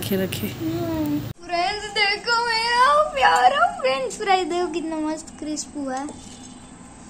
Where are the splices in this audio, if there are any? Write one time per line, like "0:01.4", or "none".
0:01.4